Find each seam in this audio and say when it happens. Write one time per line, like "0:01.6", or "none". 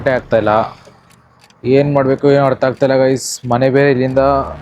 0:01.3